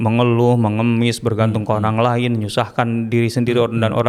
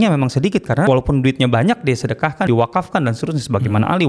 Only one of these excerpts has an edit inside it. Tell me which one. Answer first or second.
second